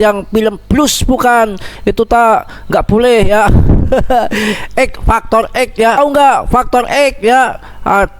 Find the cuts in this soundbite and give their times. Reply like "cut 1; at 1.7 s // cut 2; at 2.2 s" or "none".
cut 1; at 6.0 s